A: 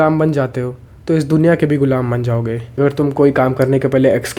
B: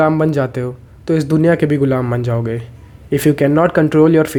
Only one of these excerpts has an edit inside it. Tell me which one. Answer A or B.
A